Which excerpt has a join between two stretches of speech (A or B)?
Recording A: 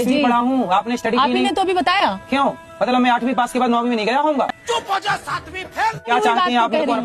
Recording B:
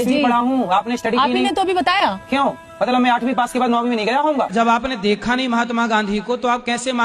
B